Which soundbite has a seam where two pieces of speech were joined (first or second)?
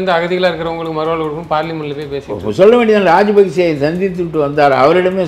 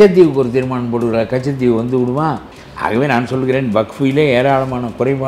second